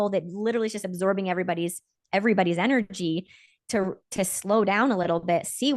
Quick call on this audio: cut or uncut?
uncut